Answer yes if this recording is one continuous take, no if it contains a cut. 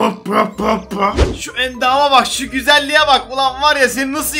no